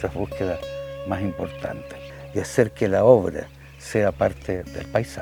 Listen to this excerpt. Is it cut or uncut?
uncut